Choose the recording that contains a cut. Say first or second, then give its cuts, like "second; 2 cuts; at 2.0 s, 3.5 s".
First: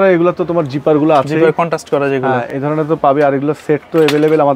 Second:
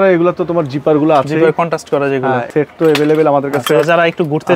second; 1 cut; at 2.5 s